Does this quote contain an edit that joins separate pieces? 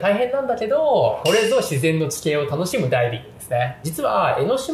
yes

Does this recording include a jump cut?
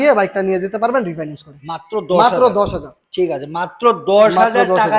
no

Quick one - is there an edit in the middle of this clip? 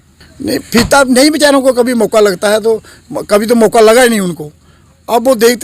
no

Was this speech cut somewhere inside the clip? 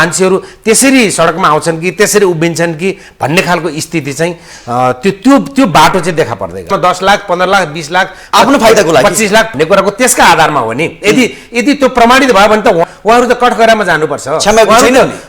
yes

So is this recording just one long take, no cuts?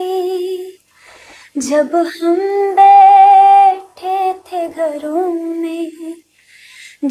yes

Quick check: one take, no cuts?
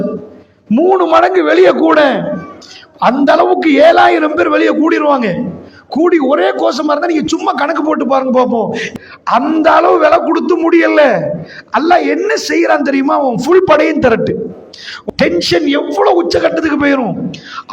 no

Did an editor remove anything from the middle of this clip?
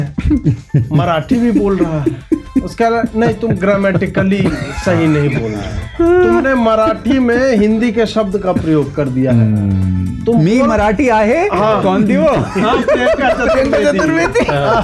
no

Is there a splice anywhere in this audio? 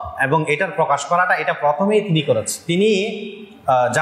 yes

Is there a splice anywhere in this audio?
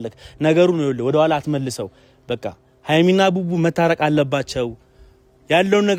no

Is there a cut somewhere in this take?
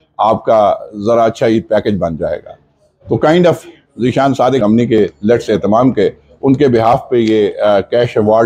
yes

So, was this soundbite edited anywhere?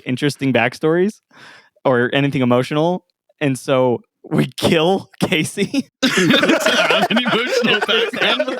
no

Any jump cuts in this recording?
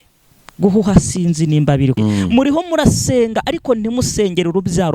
yes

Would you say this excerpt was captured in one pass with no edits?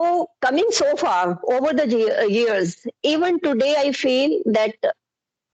yes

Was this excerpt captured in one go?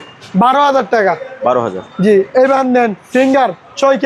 yes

